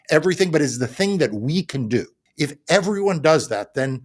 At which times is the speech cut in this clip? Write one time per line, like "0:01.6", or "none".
0:02.2